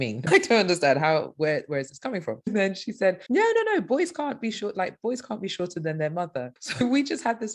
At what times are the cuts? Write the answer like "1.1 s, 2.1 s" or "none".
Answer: 6.5 s

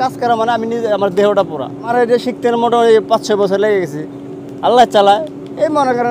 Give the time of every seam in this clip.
none

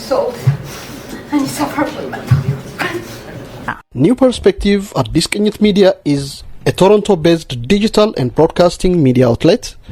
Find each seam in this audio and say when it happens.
3.8 s

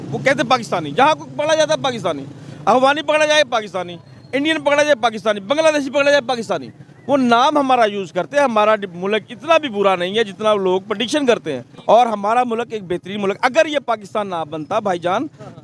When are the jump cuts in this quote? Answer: 8.1 s, 11.7 s

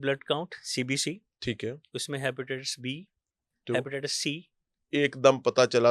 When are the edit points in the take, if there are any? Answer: 4.7 s

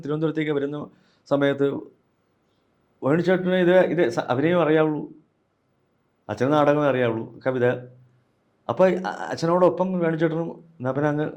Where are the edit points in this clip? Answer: none

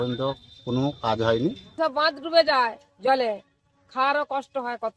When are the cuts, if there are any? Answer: 1.8 s

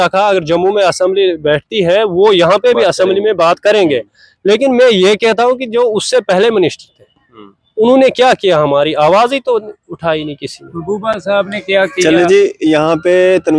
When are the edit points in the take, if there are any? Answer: none

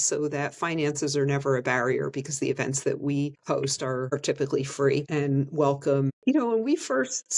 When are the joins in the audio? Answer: 3.7 s, 5.1 s, 6.2 s

